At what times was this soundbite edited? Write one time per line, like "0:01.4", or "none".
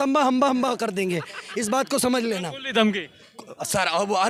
none